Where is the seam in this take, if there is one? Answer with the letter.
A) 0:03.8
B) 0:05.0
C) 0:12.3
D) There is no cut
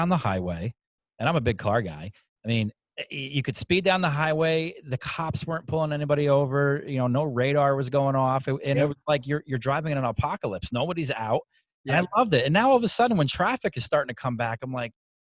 D